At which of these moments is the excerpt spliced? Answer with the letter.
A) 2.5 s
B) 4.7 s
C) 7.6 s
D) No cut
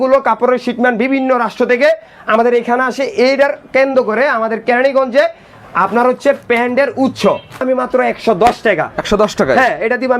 C